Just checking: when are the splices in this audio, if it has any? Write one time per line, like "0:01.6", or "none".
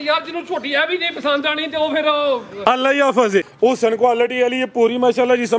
0:03.5